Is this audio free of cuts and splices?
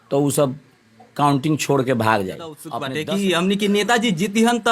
no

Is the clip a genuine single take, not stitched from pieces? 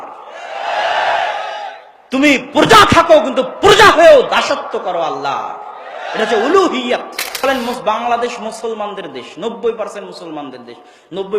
no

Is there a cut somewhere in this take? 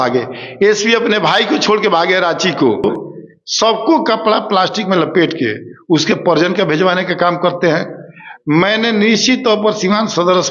yes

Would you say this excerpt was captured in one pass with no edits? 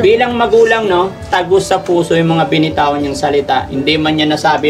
yes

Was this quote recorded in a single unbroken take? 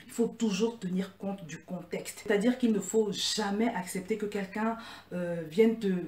no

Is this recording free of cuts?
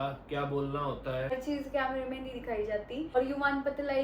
no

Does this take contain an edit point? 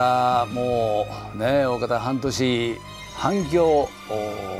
yes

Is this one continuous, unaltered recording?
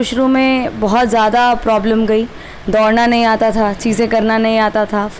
yes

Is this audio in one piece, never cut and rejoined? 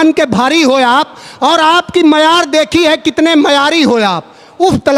yes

